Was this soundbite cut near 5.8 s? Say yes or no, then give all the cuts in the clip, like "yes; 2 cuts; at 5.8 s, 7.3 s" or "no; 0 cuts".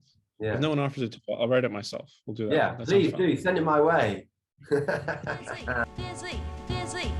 yes; 1 cut; at 5.8 s